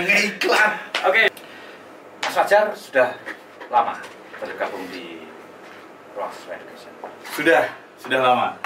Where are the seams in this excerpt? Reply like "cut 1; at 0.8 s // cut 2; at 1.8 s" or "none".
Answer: cut 1; at 1.3 s